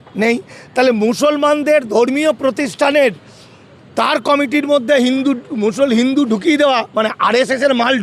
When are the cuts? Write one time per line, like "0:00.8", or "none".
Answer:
none